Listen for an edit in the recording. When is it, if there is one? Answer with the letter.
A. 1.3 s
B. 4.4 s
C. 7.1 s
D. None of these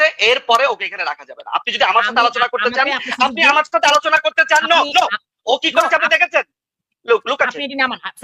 D